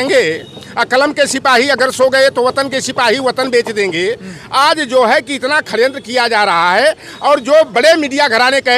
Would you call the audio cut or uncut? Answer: uncut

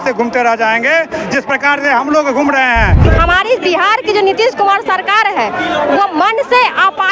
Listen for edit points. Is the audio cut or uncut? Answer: cut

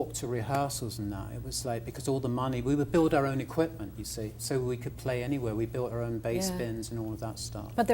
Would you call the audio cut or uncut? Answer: cut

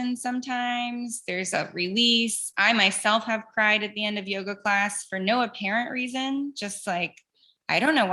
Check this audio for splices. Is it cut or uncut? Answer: uncut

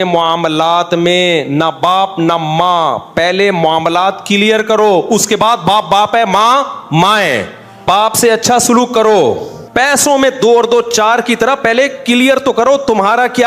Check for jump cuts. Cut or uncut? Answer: cut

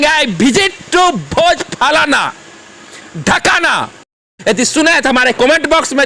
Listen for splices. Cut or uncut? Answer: uncut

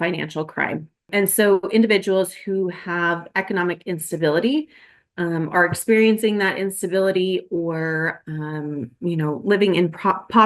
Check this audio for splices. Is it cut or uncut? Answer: cut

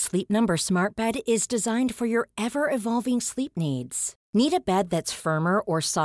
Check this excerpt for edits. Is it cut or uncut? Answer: uncut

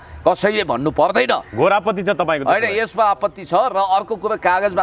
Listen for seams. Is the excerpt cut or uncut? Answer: uncut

